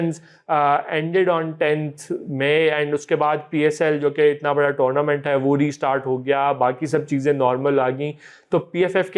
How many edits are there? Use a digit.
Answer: 0